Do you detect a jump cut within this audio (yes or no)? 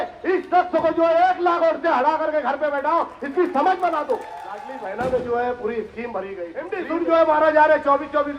yes